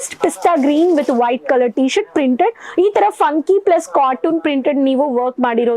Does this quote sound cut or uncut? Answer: uncut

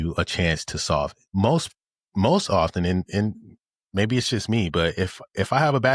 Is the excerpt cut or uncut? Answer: cut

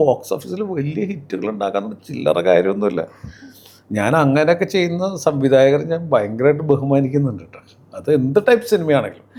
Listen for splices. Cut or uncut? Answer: uncut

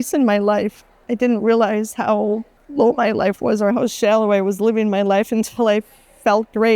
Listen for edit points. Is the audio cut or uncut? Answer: cut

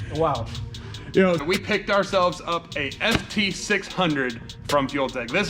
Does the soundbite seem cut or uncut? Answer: cut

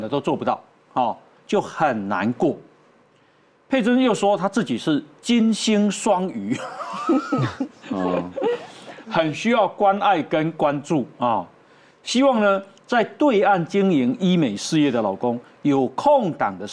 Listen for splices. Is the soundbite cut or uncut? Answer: uncut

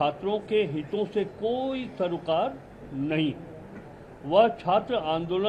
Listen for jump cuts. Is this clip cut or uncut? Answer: uncut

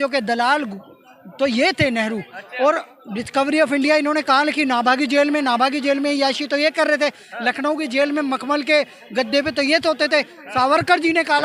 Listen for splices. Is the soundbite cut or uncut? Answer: uncut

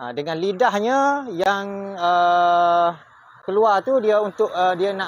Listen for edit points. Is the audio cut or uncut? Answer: uncut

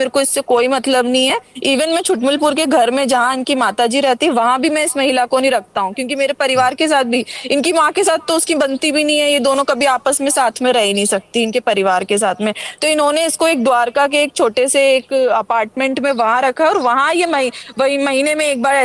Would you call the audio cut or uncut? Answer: uncut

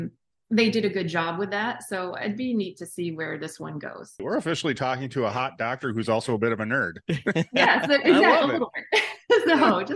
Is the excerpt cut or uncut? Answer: cut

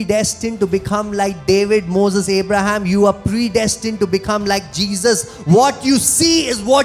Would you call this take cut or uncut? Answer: uncut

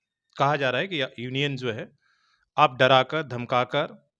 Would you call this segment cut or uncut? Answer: uncut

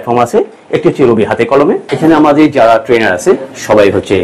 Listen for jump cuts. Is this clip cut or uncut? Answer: cut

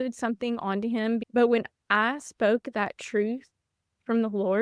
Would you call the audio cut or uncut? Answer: cut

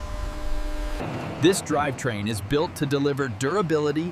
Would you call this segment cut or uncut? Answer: cut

